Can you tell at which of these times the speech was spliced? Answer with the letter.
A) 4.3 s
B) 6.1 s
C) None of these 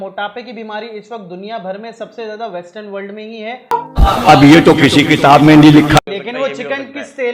B